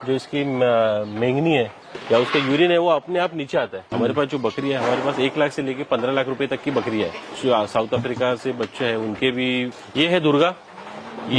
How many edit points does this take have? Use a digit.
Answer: 3